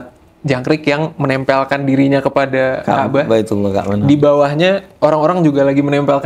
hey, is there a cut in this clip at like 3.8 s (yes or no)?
no